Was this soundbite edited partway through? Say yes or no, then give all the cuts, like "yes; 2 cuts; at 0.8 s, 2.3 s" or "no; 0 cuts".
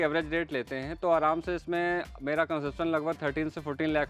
no; 0 cuts